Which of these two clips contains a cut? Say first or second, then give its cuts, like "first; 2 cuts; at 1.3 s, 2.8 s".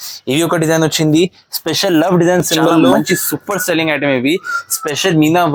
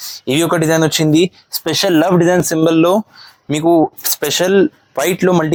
first; 1 cut; at 3.0 s